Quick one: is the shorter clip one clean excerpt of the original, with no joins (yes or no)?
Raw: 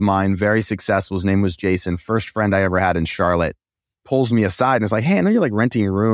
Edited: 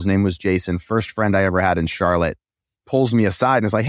yes